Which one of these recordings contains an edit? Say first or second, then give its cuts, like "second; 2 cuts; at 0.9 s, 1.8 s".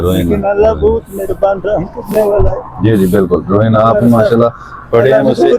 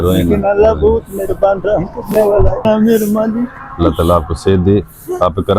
second; 1 cut; at 2.7 s